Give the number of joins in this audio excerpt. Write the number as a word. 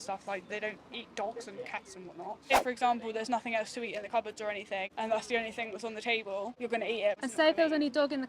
three